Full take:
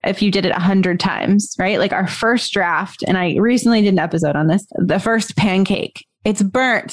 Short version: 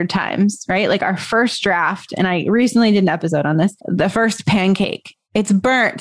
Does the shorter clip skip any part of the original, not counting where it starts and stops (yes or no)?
no